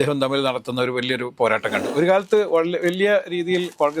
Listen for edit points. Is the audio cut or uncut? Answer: cut